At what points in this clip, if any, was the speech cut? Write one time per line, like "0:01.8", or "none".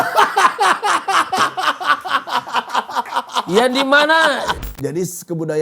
0:04.6

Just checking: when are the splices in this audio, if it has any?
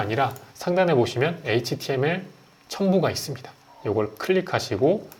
none

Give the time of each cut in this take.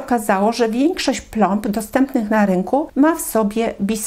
0:02.9

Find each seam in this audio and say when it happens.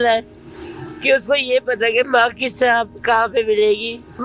none

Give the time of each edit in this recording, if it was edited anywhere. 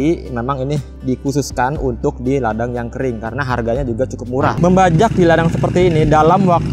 0:04.6

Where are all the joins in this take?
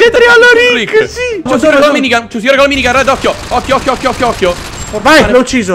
0:01.5

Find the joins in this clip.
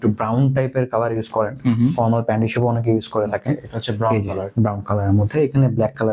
none

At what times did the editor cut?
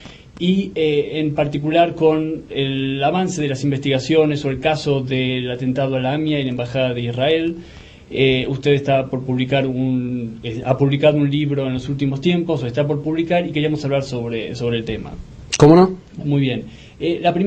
0:01.9

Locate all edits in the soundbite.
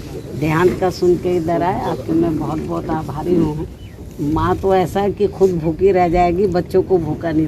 0:04.0

